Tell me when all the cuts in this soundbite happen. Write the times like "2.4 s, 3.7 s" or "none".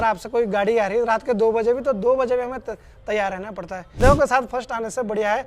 3.9 s